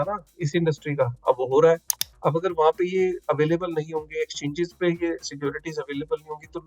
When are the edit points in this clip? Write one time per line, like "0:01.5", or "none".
0:02.0